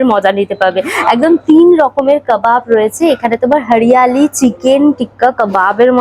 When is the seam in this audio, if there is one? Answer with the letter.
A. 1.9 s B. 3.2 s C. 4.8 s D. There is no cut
D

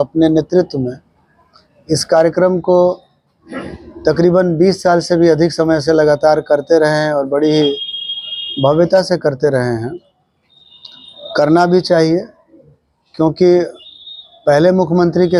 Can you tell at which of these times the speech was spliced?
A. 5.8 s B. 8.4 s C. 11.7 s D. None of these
D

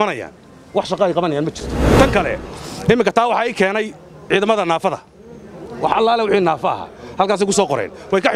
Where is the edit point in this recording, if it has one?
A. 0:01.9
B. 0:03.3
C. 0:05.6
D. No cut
A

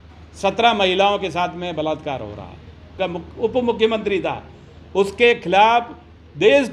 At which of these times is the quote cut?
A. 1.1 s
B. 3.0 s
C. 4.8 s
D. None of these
B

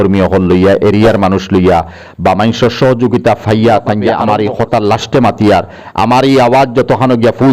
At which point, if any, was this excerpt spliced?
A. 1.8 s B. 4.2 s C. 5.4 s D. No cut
B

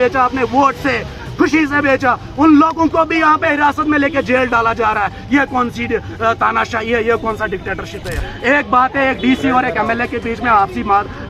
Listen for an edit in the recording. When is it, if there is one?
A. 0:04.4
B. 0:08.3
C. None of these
B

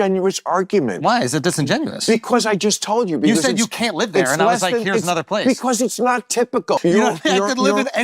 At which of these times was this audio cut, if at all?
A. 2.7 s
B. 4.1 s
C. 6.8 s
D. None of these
C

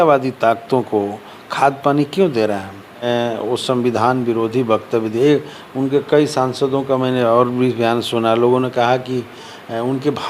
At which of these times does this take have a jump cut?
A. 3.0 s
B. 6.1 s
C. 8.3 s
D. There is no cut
A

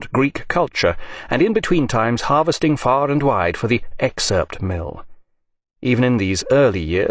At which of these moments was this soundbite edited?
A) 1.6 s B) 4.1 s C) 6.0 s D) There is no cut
B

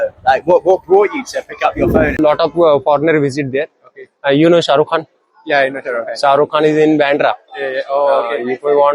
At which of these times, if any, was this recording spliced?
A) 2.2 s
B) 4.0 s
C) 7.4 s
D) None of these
A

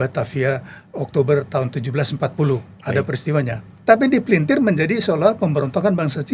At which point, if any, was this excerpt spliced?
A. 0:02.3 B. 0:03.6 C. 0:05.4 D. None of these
B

